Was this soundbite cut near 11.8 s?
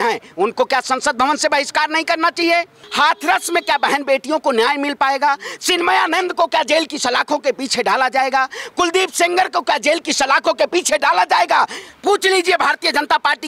yes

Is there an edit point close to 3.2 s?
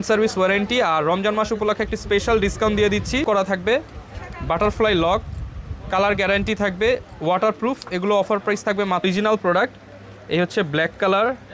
yes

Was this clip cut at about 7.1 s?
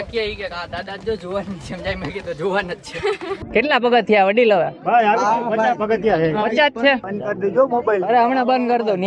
yes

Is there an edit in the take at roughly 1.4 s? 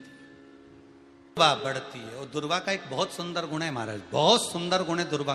yes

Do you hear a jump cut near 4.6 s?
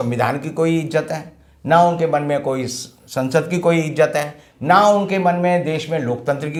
no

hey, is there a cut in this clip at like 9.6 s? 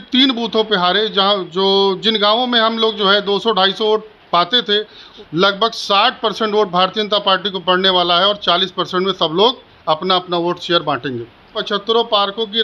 no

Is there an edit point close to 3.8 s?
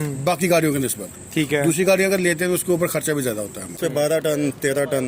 yes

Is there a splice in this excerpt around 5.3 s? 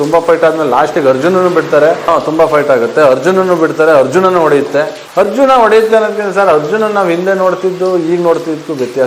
no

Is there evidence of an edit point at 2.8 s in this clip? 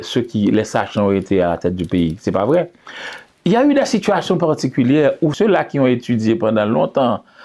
no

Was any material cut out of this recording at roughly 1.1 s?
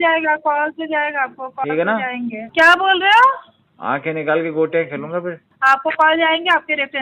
no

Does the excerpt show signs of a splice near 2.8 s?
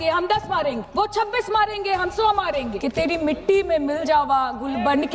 yes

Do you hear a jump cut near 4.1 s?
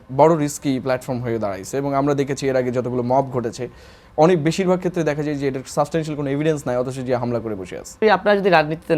no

